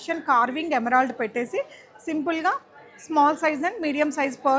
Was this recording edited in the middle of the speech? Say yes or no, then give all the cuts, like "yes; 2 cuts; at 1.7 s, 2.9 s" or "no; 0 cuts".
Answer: no; 0 cuts